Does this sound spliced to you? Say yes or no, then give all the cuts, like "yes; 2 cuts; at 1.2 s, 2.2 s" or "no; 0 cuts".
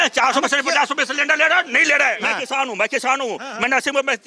yes; 1 cut; at 2.1 s